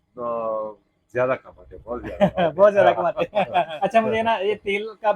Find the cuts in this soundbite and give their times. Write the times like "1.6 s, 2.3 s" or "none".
3.7 s

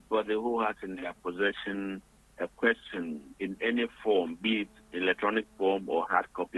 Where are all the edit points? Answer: none

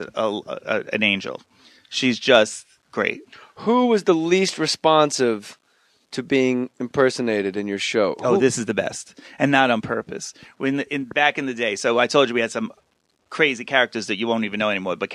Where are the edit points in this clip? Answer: 6.8 s

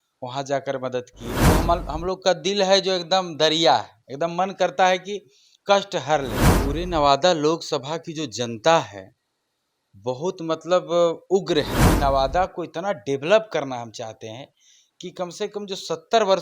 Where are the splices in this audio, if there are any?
1.3 s, 6.5 s, 11.8 s

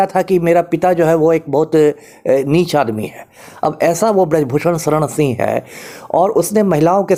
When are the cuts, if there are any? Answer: none

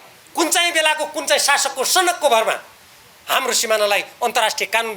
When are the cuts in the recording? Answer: none

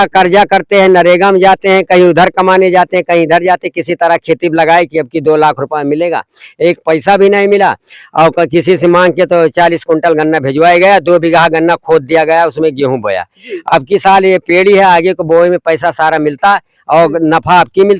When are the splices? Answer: none

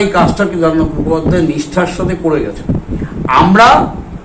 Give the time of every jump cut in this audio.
none

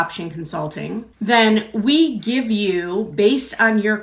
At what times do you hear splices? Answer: 1.1 s

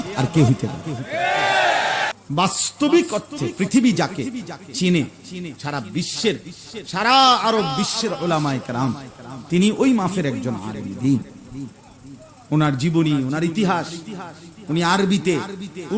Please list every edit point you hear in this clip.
2.1 s

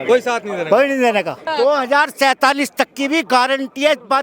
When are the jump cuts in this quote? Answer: 1.5 s

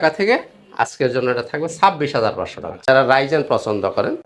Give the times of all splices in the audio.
2.6 s

